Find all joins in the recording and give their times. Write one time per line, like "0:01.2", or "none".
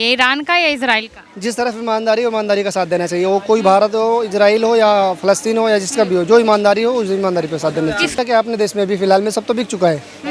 0:08.1